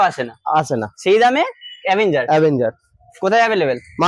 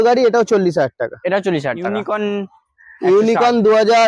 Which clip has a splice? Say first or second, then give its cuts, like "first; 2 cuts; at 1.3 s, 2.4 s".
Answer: second; 1 cut; at 2.0 s